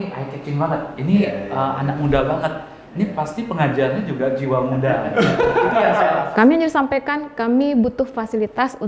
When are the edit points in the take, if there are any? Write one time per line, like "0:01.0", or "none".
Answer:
0:06.3